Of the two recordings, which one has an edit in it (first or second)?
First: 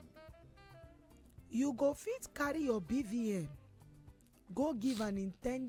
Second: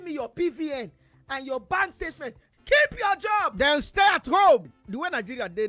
second